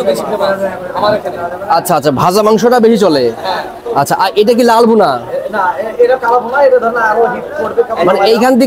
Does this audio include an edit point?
no; 0 cuts

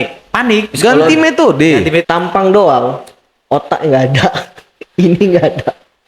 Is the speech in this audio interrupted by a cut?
yes; 1 cut; at 2.0 s

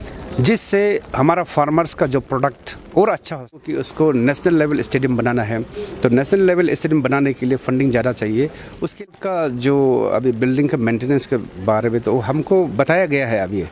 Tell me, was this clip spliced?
yes; 2 cuts; at 3.8 s, 9.0 s

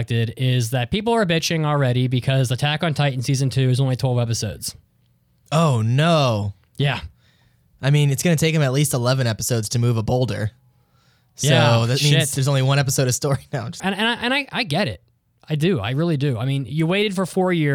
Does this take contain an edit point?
yes; 1 cut; at 13.7 s

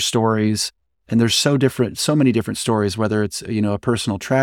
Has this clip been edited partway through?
no; 0 cuts

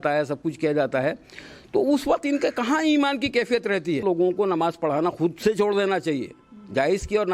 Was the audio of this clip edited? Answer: yes; 1 cut; at 4.0 s

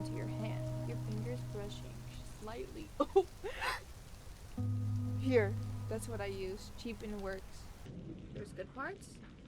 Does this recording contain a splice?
yes; 1 cut; at 7.8 s

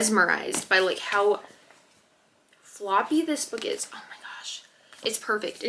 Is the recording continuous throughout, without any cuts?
yes; 0 cuts

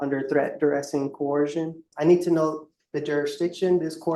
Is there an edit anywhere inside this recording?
yes; 1 cut; at 1.9 s

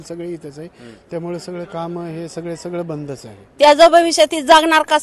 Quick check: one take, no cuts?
no; 1 cut; at 3.4 s

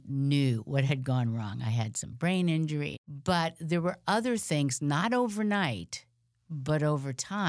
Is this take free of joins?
no; 1 cut; at 3.0 s

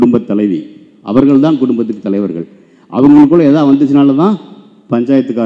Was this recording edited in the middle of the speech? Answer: no; 0 cuts

